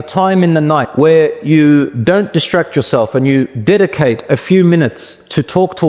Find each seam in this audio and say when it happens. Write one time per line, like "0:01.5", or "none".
0:00.9
0:01.9
0:03.5